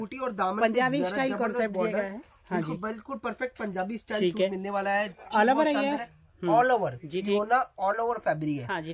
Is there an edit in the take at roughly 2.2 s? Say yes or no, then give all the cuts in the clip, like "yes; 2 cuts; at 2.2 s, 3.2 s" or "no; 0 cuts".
no; 0 cuts